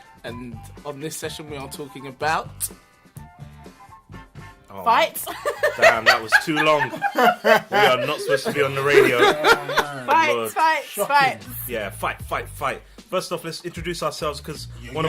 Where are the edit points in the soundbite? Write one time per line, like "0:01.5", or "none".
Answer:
0:14.1

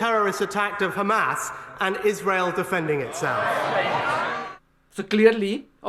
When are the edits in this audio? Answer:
0:04.3

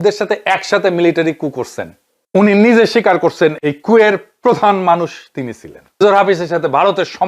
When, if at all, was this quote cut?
0:06.0

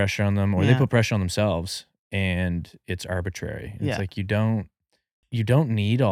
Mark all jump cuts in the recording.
0:05.2

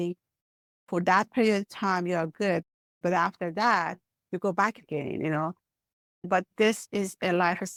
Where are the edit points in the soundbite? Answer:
none

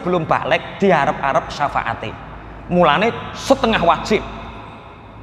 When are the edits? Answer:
none

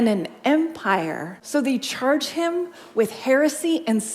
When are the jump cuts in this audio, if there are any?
0:01.3

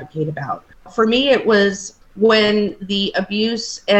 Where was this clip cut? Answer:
0:00.9
0:01.9

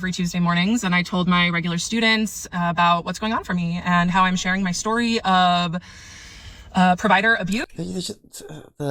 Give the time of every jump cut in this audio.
none

